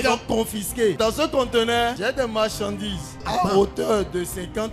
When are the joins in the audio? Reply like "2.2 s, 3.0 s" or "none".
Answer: 1.0 s, 2.0 s, 3.2 s